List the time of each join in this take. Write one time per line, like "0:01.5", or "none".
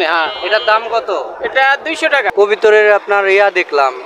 0:02.3